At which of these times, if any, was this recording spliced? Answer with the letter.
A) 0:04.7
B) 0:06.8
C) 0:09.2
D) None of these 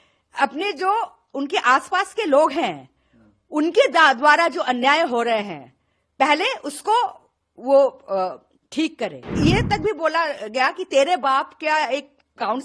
C